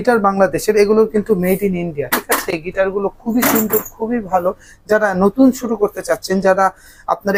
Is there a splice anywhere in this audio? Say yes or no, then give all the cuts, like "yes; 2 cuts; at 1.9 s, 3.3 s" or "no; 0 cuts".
no; 0 cuts